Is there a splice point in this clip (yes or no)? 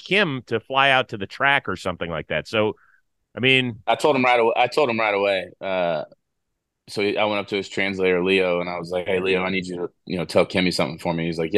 yes